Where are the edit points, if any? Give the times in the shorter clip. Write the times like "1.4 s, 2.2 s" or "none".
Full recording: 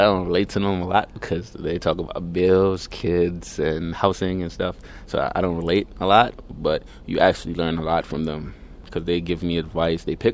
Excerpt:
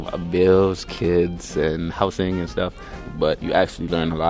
3.1 s